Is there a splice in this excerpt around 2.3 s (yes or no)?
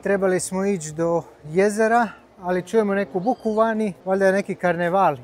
no